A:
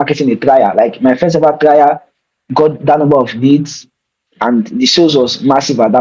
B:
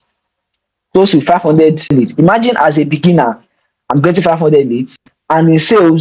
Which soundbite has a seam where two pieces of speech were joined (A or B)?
B